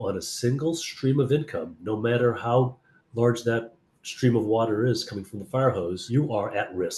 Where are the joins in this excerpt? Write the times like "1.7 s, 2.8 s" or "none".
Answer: 6.0 s